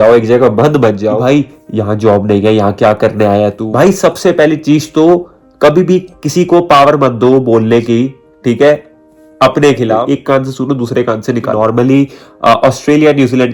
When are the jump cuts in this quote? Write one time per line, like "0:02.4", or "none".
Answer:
0:01.2
0:03.6
0:10.0
0:11.5